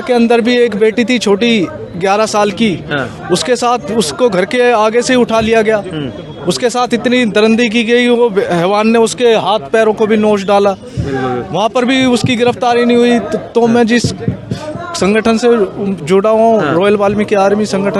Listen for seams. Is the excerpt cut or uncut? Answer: uncut